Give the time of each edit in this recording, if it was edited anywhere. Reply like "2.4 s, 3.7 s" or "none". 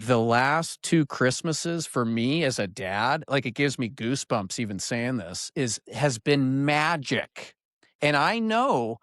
none

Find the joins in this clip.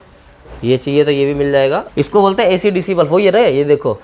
1.9 s

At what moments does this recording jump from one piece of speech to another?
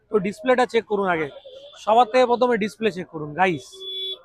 none

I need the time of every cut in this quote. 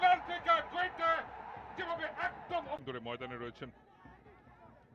2.8 s

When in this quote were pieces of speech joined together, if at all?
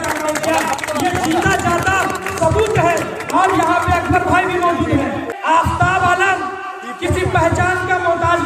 5.3 s

